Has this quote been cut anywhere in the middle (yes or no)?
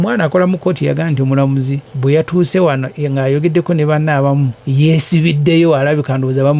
yes